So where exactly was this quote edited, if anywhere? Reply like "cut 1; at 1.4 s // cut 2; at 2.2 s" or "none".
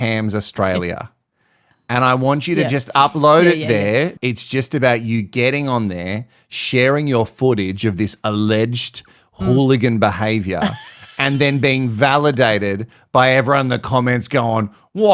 cut 1; at 4.1 s